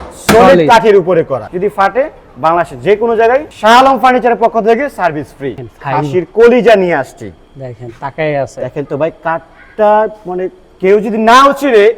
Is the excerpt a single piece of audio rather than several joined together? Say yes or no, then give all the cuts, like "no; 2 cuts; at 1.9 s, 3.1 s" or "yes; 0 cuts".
no; 2 cuts; at 1.4 s, 5.5 s